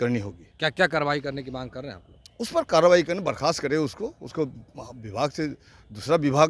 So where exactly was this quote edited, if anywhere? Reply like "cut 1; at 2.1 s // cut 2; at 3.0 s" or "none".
none